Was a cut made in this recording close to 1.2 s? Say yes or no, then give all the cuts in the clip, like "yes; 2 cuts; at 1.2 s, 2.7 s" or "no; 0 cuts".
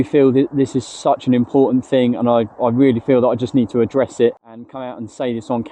no; 1 cut; at 4.7 s